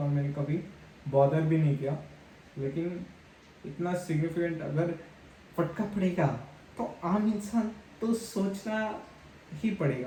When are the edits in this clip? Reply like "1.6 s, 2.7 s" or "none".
none